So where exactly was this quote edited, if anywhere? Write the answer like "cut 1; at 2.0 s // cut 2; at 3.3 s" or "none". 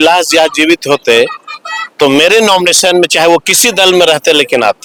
none